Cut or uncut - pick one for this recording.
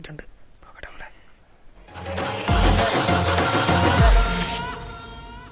cut